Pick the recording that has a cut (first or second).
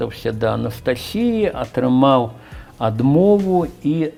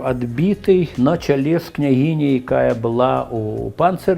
second